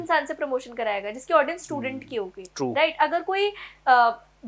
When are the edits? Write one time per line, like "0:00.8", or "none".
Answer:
none